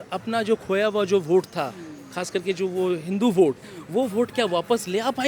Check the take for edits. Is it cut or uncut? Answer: uncut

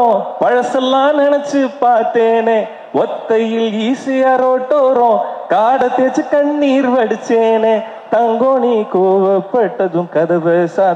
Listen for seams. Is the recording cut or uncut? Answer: uncut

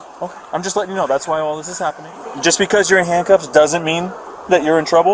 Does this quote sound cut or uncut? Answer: cut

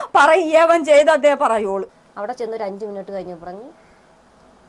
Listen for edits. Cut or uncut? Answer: cut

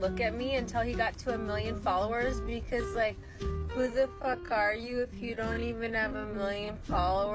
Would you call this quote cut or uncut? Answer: uncut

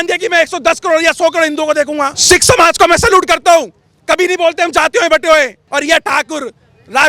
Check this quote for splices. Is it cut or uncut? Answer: cut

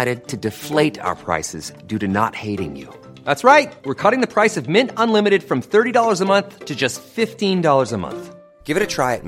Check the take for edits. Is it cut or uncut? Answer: uncut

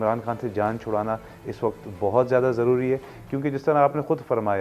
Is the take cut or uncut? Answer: uncut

